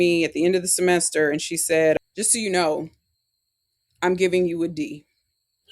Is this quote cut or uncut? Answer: cut